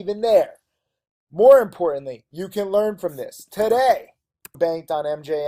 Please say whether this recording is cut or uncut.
uncut